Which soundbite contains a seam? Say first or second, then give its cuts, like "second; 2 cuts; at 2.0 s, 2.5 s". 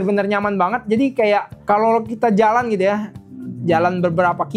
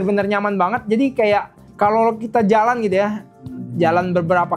first; 1 cut; at 1.5 s